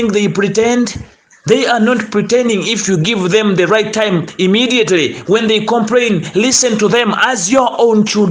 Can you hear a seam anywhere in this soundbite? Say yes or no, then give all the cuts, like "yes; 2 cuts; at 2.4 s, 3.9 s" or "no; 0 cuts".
no; 0 cuts